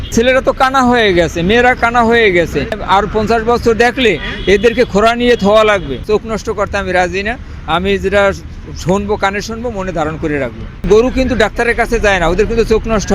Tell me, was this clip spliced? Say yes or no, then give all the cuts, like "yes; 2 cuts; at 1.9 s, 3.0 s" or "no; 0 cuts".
yes; 3 cuts; at 2.8 s, 6.0 s, 10.8 s